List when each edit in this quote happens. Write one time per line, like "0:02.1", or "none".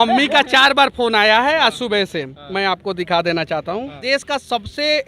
0:04.0